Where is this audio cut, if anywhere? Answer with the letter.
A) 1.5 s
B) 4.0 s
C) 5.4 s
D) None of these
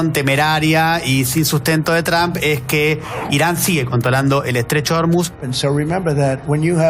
C